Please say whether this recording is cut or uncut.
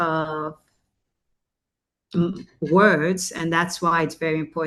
uncut